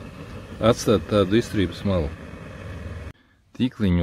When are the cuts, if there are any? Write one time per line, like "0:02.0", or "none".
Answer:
0:03.1